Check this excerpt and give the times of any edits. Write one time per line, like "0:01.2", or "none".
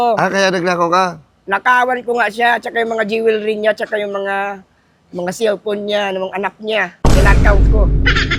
none

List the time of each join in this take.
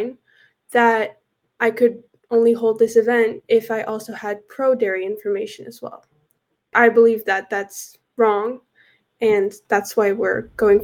0:01.5
0:06.7

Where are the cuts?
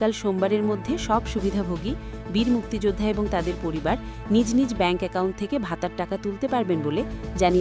none

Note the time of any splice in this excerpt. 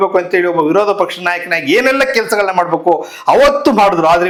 none

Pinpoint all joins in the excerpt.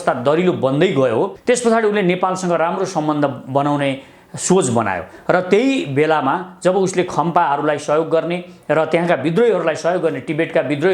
0:01.3

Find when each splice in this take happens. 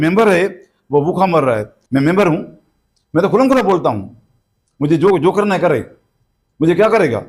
0:01.7

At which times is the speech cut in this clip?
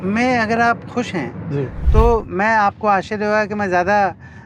0:01.8

